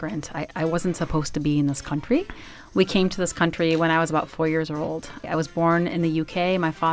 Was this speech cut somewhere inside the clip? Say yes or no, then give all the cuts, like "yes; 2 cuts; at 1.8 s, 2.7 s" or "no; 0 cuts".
yes; 1 cut; at 5.2 s